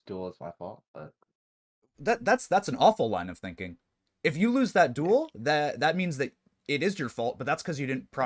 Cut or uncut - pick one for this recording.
uncut